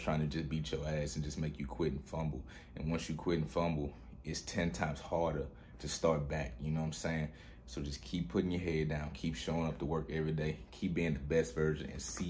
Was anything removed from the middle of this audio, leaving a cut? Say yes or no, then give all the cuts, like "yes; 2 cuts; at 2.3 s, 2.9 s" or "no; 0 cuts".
no; 0 cuts